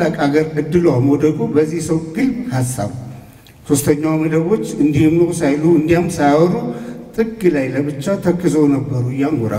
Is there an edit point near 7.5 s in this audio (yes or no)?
no